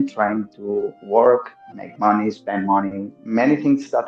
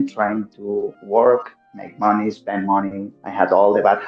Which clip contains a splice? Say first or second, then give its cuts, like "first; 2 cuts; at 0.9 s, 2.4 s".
first; 1 cut; at 3.2 s